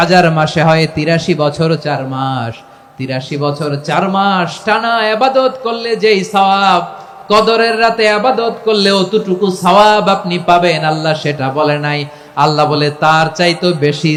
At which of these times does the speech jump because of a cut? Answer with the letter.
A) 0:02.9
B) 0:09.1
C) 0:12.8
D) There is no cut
D